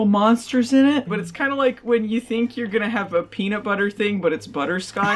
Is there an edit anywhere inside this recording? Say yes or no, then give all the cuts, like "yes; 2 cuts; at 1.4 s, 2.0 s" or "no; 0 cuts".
yes; 1 cut; at 1.1 s